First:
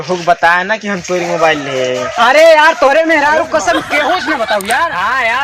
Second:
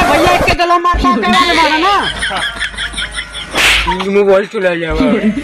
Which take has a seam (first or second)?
second